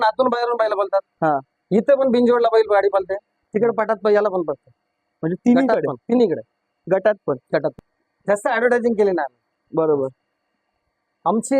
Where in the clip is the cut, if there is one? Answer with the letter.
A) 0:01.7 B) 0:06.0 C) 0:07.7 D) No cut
C